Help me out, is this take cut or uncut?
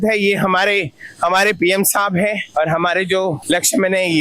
uncut